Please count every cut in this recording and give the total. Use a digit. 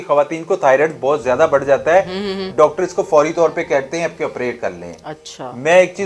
0